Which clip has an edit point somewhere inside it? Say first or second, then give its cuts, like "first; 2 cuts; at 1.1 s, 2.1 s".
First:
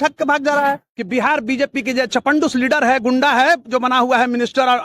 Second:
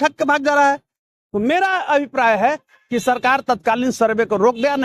first; 1 cut; at 0.9 s